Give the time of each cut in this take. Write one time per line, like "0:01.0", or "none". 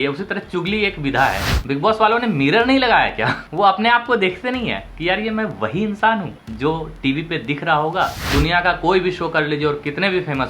0:01.5
0:03.4
0:04.9
0:06.4
0:08.2